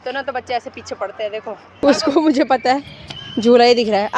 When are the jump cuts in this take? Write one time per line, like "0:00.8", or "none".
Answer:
0:01.8